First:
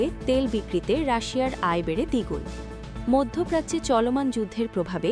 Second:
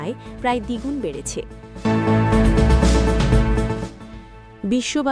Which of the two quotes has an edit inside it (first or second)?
second